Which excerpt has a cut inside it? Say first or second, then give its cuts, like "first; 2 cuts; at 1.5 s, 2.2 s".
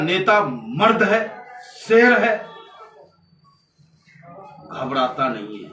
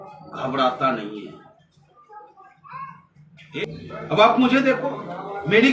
second; 1 cut; at 3.6 s